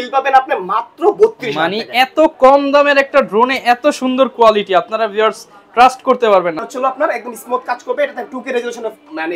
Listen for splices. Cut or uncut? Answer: cut